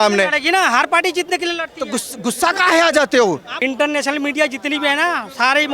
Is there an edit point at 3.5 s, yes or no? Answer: yes